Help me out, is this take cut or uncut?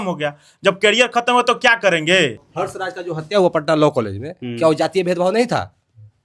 cut